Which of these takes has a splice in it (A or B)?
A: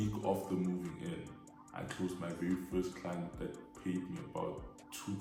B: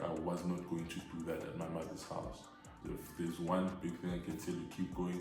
B